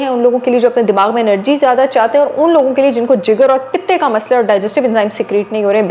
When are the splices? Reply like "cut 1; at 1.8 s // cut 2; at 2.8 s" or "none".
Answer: none